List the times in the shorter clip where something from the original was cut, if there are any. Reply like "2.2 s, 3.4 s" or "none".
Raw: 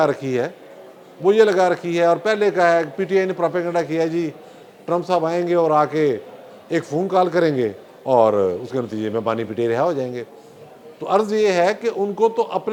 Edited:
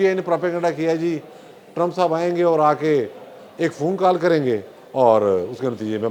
none